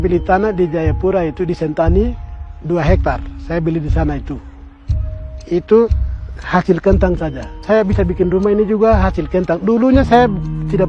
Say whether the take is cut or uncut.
uncut